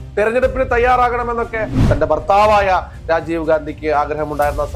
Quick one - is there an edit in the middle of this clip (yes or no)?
yes